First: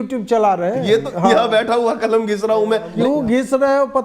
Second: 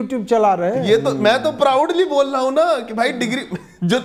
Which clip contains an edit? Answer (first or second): first